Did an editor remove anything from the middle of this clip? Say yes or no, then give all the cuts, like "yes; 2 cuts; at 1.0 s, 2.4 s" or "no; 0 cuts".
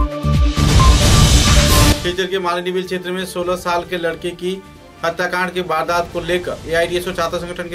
no; 0 cuts